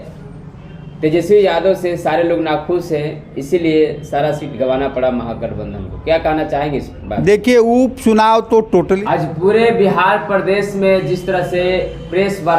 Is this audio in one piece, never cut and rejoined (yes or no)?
no